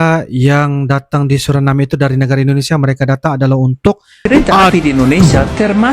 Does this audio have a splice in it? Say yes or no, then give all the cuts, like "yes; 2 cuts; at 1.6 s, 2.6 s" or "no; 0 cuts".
yes; 1 cut; at 4.1 s